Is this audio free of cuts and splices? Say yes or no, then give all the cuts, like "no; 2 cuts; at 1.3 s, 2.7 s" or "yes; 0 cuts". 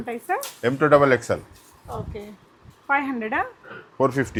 yes; 0 cuts